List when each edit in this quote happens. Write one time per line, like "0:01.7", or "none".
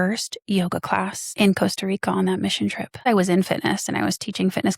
0:01.2
0:03.1